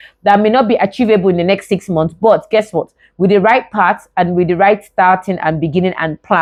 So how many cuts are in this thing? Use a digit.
0